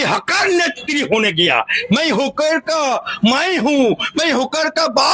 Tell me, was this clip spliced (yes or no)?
no